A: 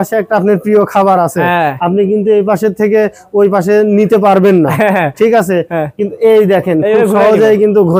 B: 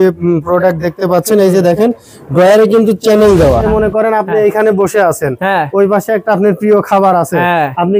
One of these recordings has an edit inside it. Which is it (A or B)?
B